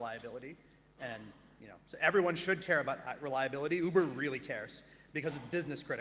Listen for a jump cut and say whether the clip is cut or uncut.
cut